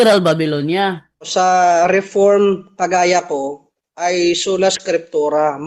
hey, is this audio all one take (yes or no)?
no